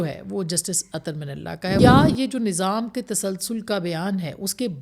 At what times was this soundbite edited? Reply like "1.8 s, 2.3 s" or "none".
1.8 s